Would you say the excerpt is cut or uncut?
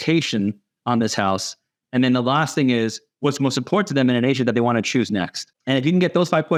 uncut